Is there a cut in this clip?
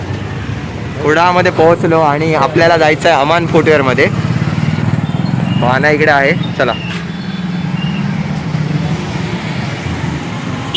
no; 0 cuts

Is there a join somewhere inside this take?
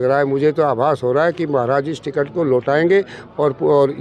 no; 0 cuts

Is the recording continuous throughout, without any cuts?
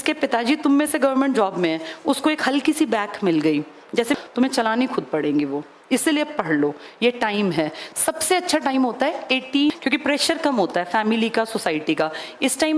no; 2 cuts; at 4.1 s, 9.7 s

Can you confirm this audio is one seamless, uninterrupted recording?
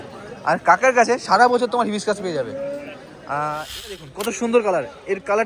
no; 1 cut; at 3.8 s

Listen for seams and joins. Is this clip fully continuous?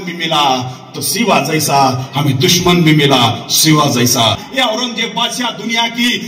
no; 1 cut; at 4.4 s

